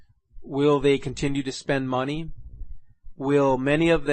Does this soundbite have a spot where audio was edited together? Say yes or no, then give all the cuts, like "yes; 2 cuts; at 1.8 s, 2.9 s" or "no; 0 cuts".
yes; 1 cut; at 3.1 s